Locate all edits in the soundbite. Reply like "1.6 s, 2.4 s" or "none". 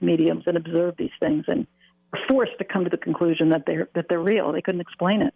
none